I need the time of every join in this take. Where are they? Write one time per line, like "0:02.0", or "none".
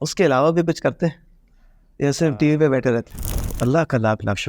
0:03.4